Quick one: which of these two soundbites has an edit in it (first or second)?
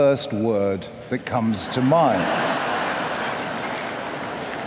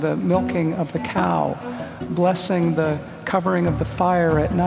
first